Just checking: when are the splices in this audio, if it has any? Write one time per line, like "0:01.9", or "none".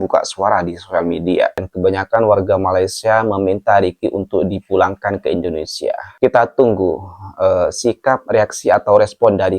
0:01.7